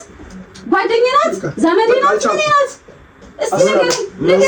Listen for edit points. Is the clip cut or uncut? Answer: uncut